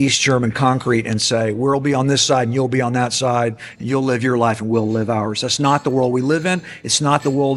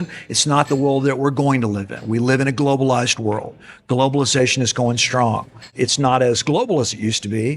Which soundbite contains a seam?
second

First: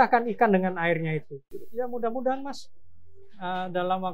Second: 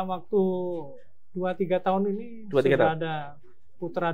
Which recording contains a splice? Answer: first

